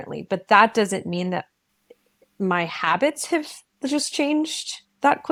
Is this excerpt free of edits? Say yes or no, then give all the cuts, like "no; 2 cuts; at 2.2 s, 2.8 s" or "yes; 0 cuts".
yes; 0 cuts